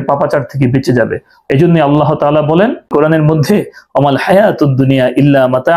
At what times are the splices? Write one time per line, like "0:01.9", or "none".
0:01.3